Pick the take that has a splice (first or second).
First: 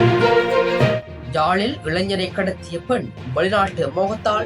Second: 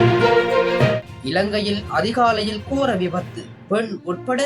first